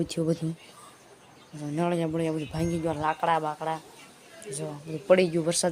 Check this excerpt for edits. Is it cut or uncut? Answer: uncut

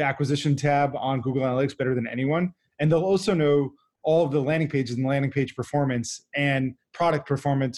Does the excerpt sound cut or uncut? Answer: uncut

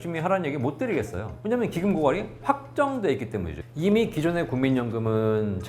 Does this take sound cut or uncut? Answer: cut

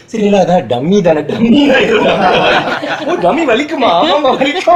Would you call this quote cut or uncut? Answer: uncut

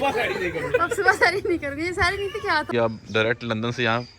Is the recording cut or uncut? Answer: cut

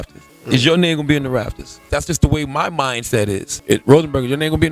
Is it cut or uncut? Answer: cut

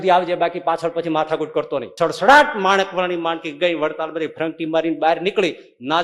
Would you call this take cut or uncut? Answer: cut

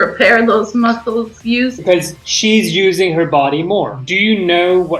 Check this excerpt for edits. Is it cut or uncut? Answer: cut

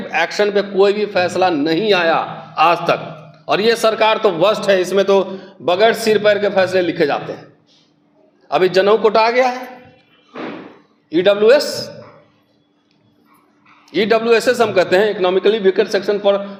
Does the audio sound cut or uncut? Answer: uncut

